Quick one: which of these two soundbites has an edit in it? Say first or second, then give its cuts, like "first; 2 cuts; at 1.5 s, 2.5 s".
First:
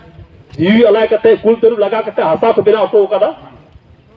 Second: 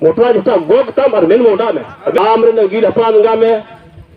second; 1 cut; at 2.2 s